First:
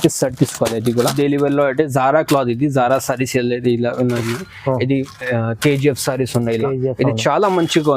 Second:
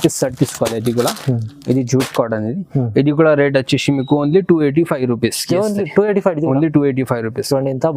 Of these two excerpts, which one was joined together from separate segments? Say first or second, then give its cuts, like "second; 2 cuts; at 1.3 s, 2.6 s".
first; 1 cut; at 1.1 s